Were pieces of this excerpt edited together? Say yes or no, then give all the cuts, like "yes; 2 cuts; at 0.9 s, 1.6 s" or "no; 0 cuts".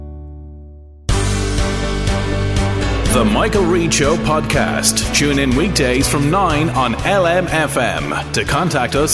yes; 1 cut; at 0.9 s